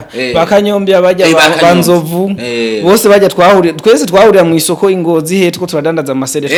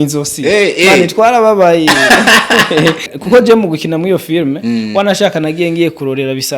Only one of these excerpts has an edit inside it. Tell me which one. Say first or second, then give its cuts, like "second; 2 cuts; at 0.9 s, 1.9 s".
second; 1 cut; at 3.1 s